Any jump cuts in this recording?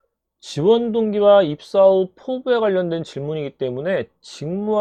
no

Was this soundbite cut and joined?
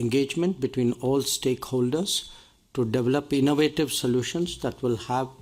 no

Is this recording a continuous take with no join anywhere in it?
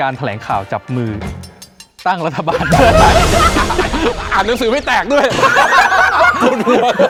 yes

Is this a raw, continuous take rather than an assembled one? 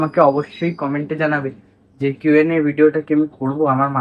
yes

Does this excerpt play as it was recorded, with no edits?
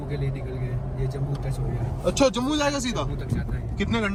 yes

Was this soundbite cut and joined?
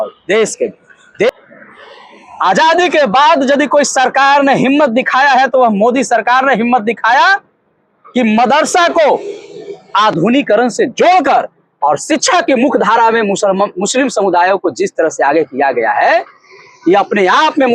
yes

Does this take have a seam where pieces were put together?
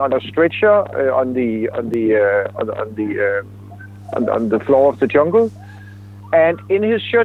no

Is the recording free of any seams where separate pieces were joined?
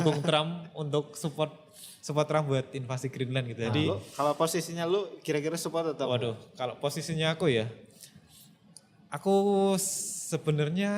yes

